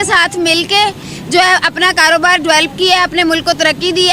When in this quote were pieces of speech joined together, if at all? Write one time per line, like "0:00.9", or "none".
none